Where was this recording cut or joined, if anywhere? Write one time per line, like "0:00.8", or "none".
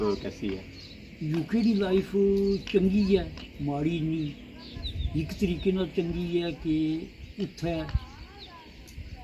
none